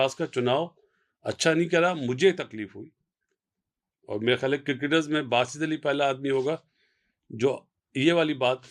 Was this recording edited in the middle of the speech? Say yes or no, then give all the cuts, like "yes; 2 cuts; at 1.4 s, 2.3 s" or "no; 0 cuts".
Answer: no; 0 cuts